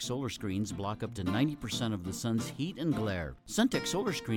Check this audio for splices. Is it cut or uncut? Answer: uncut